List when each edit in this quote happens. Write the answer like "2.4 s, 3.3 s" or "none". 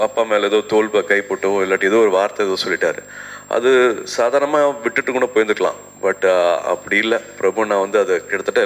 none